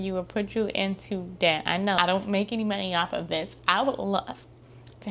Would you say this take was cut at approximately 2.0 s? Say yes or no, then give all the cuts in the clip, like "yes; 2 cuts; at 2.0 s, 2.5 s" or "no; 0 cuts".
yes; 1 cut; at 2.0 s